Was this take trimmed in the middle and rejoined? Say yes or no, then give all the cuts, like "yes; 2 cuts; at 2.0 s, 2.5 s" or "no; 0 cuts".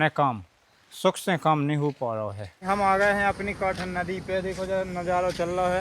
yes; 1 cut; at 2.6 s